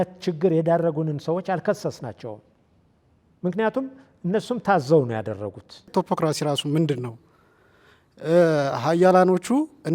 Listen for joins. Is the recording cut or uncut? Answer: cut